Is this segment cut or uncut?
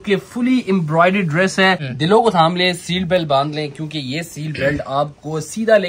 cut